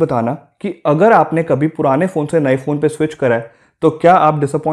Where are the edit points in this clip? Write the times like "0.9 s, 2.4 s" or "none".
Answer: none